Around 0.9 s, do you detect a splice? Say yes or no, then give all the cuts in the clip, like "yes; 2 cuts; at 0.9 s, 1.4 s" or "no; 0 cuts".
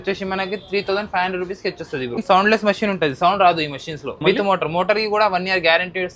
no; 2 cuts; at 2.2 s, 4.2 s